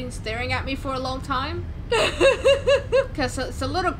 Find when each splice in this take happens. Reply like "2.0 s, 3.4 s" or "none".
none